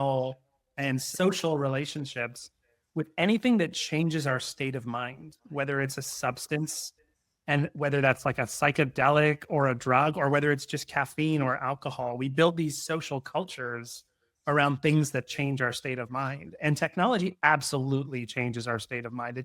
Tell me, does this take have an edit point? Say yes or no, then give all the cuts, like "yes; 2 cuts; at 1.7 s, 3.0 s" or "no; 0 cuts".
yes; 1 cut; at 1.1 s